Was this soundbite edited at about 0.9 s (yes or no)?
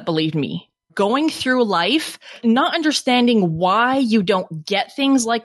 yes